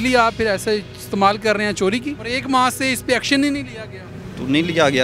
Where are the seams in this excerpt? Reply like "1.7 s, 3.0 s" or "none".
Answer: 2.3 s